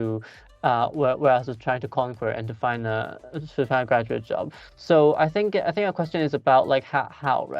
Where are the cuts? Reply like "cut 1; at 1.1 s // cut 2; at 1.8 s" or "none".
none